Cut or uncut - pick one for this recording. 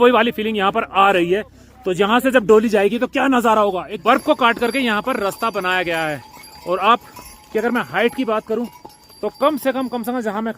cut